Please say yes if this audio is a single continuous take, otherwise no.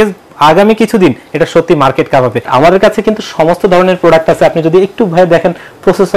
no